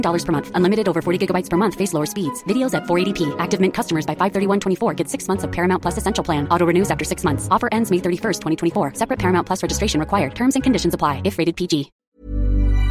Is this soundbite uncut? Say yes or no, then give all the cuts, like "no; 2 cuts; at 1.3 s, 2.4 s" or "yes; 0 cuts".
no; 1 cut; at 12.0 s